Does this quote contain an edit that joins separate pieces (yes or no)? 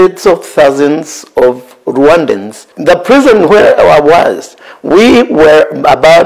no